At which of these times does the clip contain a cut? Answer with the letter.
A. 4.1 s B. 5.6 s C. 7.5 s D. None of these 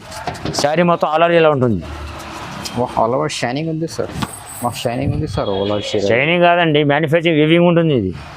A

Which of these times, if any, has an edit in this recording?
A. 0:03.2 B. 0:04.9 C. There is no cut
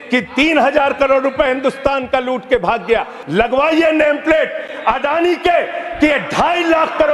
A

